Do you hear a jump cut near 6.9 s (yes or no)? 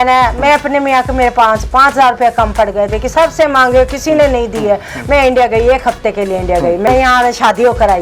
yes